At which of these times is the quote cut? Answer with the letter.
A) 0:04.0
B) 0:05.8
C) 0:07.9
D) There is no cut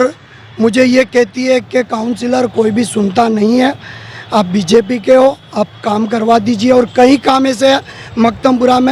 D